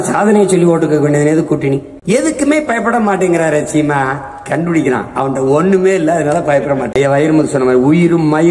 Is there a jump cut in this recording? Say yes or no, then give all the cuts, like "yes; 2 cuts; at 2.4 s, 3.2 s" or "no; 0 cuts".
yes; 1 cut; at 1.9 s